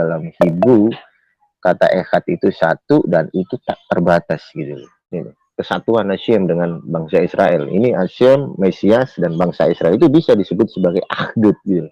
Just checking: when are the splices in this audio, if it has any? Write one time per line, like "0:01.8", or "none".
0:05.1